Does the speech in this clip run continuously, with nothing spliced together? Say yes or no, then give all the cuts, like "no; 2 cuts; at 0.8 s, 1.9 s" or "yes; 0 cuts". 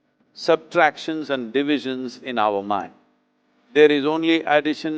yes; 0 cuts